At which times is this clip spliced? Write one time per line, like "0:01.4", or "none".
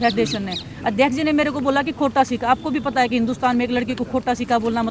none